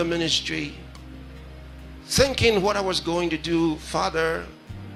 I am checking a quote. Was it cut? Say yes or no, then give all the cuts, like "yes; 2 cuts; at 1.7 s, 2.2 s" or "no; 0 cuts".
no; 0 cuts